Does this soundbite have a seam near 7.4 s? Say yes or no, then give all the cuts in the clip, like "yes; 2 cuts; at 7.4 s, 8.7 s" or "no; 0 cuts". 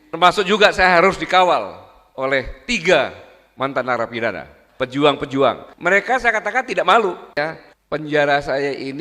yes; 1 cut; at 7.4 s